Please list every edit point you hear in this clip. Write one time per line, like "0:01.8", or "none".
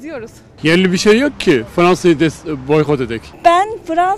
0:03.2